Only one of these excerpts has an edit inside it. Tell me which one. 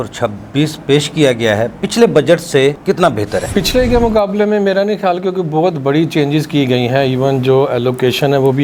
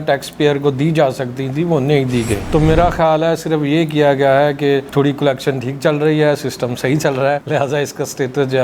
second; 1 cut; at 2.4 s

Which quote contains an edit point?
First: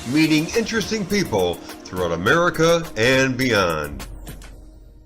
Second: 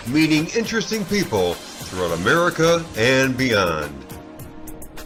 first; 1 cut; at 4.0 s

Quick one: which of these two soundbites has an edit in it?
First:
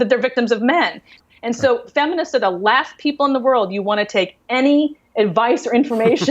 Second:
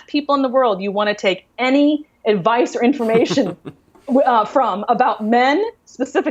first; 1 cut; at 1.1 s

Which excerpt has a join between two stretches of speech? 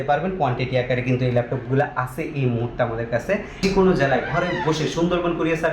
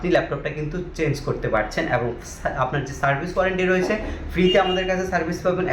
first; 1 cut; at 3.5 s

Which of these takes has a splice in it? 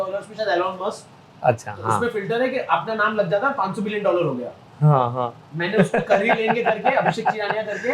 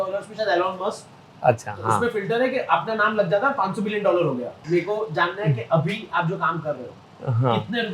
second; 1 cut; at 4.5 s

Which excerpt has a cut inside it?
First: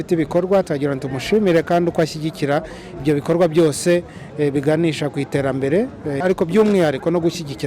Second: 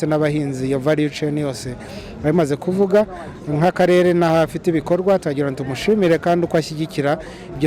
first; 1 cut; at 6.2 s

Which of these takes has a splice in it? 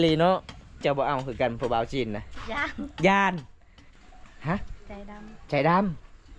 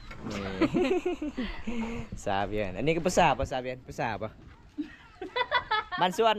first; 2 cuts; at 0.8 s, 3.8 s

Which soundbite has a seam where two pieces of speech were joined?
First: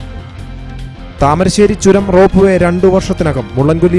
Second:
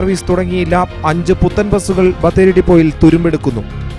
first; 1 cut; at 1.0 s

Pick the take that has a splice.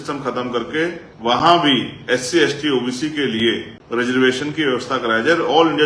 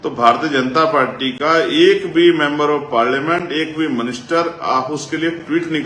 first; 2 cuts; at 1.1 s, 3.7 s

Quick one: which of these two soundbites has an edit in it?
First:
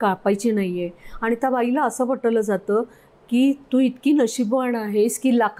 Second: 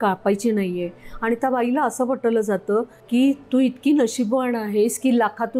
second; 1 cut; at 3.0 s

